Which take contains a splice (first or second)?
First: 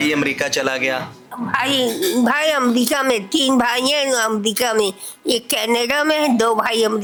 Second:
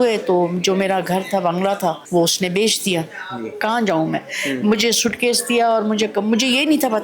second